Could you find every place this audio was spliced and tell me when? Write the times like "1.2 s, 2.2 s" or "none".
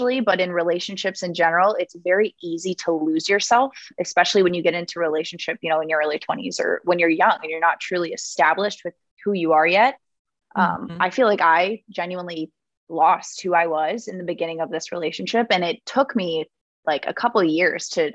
none